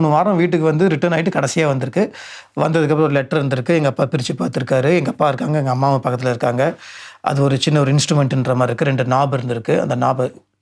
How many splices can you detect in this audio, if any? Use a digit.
0